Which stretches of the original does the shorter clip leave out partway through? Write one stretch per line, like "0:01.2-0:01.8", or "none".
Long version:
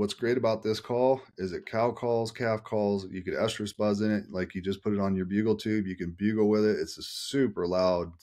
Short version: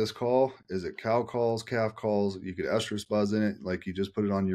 none